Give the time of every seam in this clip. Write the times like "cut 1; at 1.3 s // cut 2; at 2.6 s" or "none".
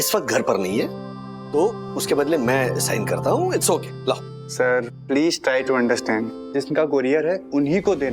cut 1; at 6.4 s